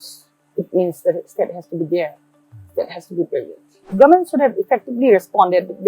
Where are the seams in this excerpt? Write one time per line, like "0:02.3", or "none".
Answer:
0:03.9

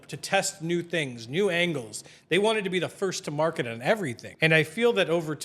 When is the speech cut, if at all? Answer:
0:04.2

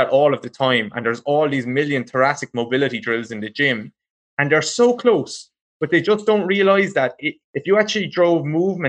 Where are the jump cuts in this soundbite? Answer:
0:07.4

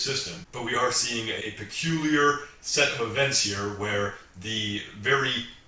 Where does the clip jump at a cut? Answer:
0:01.4

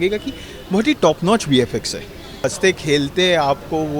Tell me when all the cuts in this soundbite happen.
0:02.4

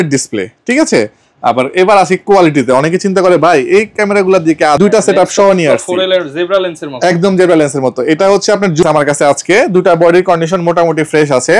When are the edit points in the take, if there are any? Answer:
0:04.8
0:08.8

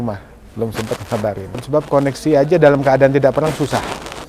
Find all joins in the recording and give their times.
0:01.6

